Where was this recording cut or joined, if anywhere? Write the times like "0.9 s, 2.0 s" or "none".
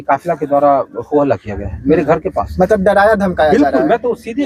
none